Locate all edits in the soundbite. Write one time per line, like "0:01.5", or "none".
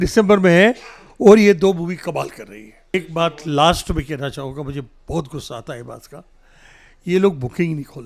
0:02.9